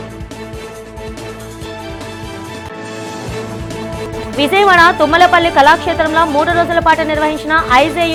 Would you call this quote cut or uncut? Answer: uncut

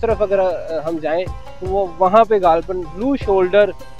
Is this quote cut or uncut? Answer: uncut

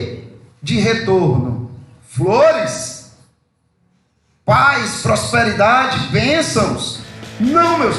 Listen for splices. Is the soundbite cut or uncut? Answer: uncut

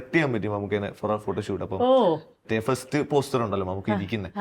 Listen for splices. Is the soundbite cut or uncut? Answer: cut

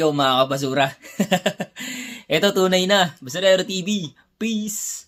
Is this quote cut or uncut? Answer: uncut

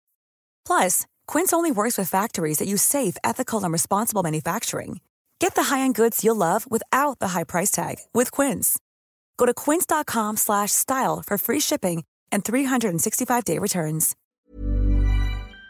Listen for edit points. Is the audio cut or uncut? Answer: cut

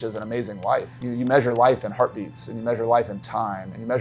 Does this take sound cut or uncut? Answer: cut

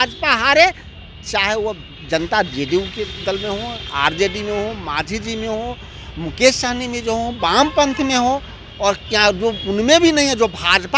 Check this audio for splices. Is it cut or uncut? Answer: uncut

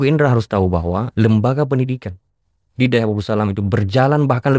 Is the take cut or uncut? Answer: uncut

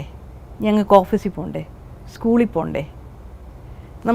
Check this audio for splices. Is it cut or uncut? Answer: uncut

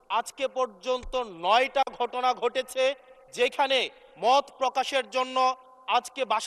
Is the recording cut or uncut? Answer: uncut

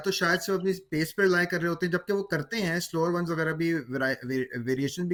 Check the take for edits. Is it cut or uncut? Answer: uncut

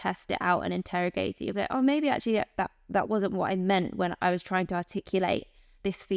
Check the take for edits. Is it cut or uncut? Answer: uncut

